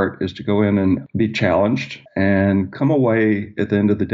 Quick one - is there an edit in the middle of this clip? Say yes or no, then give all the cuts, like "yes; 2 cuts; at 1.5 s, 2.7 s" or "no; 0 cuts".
yes; 1 cut; at 1.0 s